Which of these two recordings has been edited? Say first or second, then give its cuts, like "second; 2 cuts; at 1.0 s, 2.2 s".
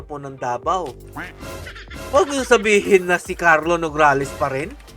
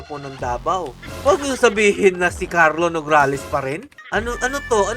second; 2 cuts; at 1.0 s, 3.9 s